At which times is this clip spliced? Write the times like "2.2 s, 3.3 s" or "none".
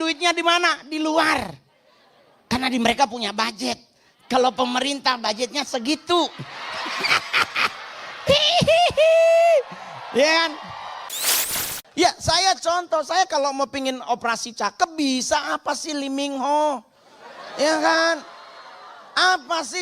11.4 s